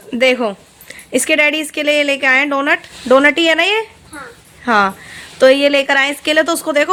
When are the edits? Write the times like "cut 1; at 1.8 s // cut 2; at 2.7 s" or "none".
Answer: none